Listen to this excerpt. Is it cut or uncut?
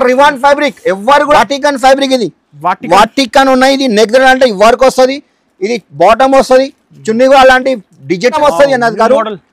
cut